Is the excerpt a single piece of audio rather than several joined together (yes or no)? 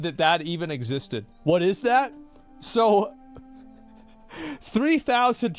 no